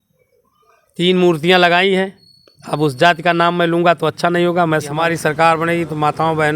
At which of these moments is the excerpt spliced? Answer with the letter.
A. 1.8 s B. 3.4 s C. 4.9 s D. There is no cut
C